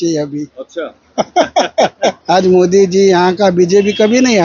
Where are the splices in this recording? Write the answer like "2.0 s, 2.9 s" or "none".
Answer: 2.2 s